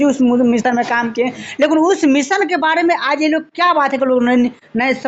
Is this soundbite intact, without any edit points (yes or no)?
yes